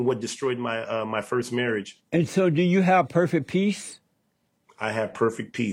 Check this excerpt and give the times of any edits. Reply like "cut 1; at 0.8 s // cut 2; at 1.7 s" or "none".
cut 1; at 1.9 s